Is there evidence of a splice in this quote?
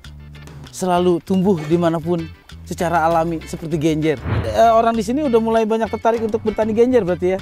yes; 1 cut; at 4.5 s

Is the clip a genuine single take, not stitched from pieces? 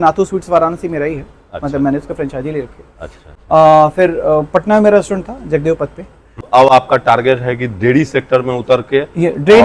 yes; 0 cuts

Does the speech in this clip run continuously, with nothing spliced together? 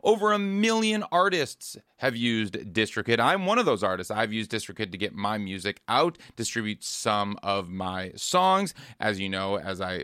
yes; 0 cuts

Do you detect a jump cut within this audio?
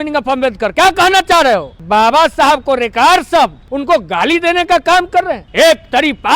yes; 3 cuts; at 1.8 s, 3.7 s, 5.4 s

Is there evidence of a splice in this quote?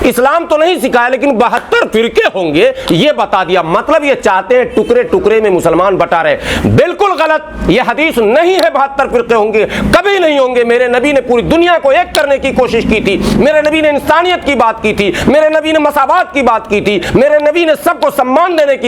no; 0 cuts

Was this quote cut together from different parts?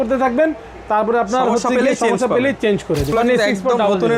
yes; 1 cut; at 3.1 s

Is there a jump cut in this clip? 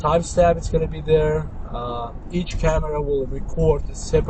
no; 0 cuts

